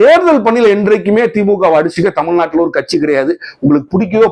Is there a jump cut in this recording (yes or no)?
no